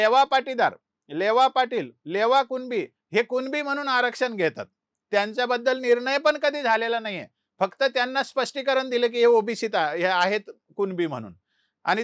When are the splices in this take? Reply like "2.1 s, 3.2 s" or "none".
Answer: none